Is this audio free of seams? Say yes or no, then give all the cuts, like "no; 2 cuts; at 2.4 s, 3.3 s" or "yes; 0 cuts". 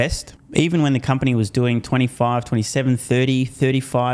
yes; 0 cuts